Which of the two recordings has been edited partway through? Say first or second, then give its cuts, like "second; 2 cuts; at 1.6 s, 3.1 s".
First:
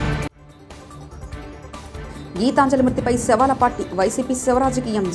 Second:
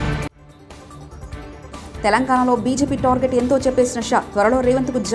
second; 1 cut; at 1.7 s